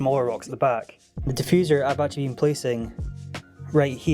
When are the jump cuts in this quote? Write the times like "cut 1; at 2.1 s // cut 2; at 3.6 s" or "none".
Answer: cut 1; at 1.3 s